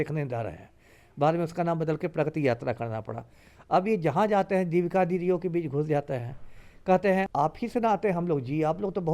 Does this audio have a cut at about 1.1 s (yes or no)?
no